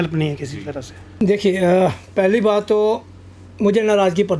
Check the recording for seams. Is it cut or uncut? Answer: cut